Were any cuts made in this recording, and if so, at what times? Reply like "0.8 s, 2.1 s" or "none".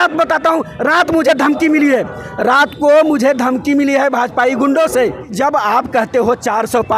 5.3 s